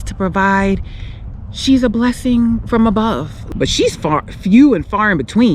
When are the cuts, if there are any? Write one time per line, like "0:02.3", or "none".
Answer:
0:03.3

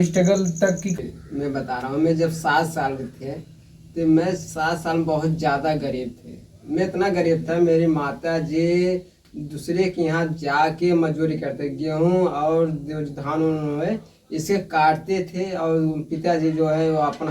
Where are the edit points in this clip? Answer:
0:00.9

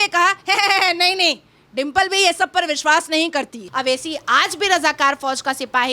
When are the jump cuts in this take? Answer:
0:03.6

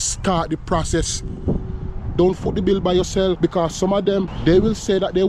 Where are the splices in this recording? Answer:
0:03.4
0:04.3

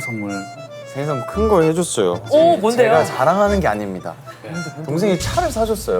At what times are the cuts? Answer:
0:02.2

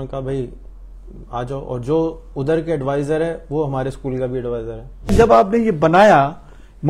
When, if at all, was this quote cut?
0:05.1

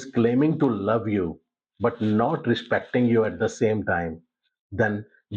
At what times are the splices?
none

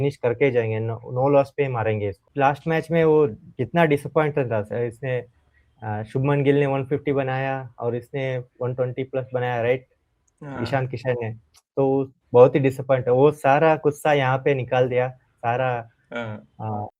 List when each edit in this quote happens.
0:02.3

